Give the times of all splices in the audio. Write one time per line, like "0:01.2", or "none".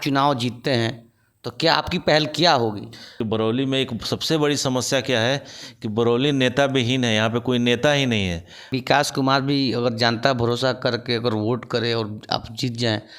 0:03.2
0:08.7